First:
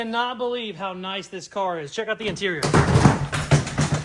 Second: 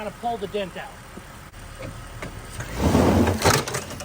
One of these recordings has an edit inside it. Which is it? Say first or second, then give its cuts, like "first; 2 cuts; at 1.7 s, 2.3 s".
second; 1 cut; at 1.3 s